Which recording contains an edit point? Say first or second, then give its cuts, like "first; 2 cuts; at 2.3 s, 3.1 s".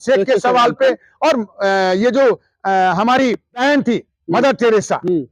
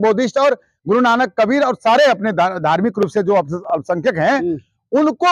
first; 1 cut; at 3.6 s